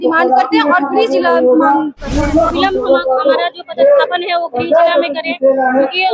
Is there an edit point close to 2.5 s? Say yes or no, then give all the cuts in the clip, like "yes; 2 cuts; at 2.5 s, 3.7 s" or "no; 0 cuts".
yes; 1 cut; at 2.5 s